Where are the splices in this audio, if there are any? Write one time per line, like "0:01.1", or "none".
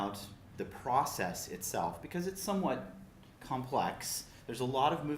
0:04.0